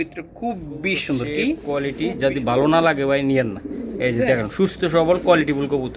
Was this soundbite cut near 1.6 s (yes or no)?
yes